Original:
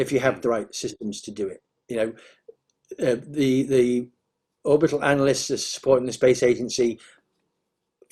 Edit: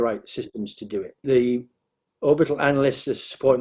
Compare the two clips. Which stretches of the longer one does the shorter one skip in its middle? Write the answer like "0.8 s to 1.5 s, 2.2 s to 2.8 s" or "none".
1.7 s to 3.7 s